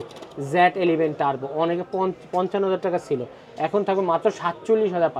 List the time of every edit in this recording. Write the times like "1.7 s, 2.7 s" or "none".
none